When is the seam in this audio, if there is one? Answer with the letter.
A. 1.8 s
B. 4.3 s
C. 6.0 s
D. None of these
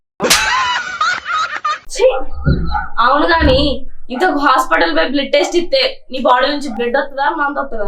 A